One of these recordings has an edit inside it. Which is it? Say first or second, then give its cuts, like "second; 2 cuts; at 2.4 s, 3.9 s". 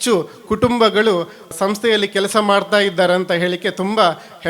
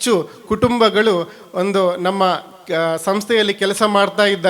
first; 1 cut; at 1.5 s